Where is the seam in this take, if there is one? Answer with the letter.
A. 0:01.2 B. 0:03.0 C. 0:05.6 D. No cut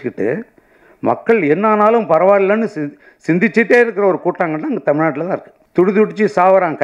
C